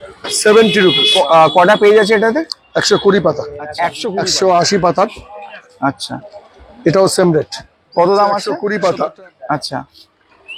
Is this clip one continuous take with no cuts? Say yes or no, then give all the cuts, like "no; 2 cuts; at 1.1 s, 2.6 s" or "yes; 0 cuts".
no; 3 cuts; at 1.1 s, 3.9 s, 8.5 s